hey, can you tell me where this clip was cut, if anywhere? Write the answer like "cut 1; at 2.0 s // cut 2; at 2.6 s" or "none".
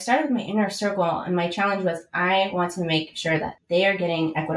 cut 1; at 3.6 s